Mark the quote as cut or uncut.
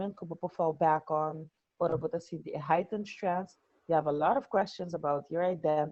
uncut